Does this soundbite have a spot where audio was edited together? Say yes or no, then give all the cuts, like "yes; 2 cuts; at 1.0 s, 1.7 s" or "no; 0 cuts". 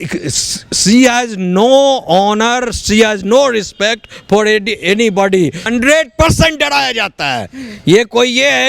yes; 1 cut; at 5.6 s